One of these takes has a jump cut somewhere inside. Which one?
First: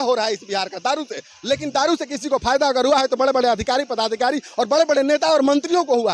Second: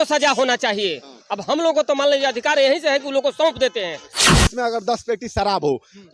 second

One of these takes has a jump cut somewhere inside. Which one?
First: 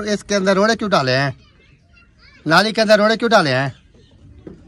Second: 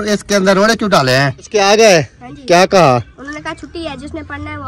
second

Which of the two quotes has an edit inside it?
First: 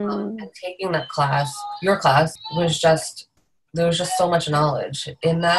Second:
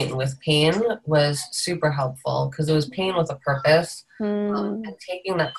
first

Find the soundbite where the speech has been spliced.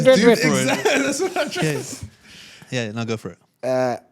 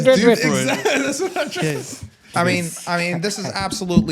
second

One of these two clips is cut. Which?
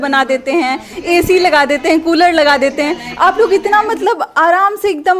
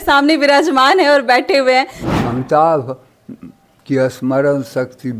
second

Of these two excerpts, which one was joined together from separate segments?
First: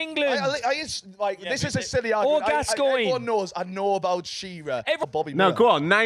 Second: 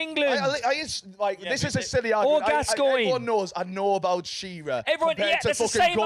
first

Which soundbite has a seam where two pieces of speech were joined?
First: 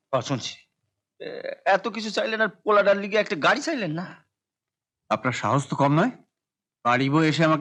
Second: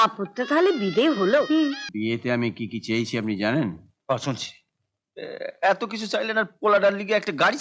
second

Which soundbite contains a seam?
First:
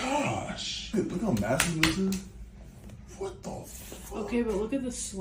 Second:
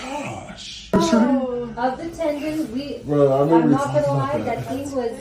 second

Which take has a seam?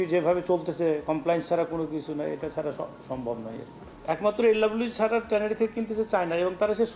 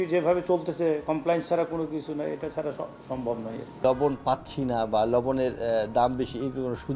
second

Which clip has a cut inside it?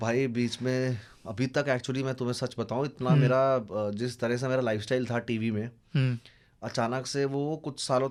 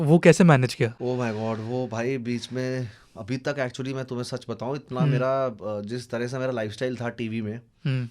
second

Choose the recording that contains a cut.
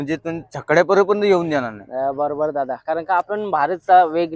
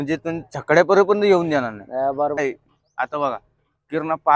second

